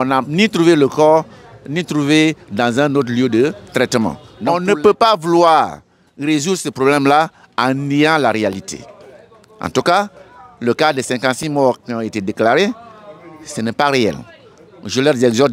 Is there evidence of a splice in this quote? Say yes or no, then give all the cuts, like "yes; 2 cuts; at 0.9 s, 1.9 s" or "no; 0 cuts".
yes; 1 cut; at 4.3 s